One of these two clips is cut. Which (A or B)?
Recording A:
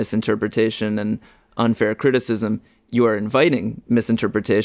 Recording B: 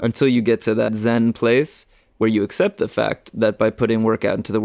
B